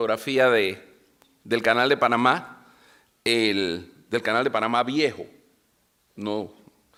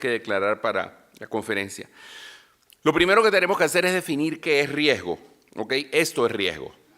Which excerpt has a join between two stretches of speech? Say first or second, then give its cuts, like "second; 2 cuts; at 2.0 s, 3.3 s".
second; 1 cut; at 5.1 s